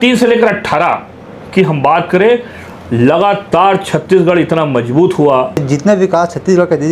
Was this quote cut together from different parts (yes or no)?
yes